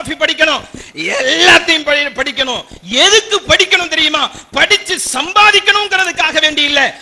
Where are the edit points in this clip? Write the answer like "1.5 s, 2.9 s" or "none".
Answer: none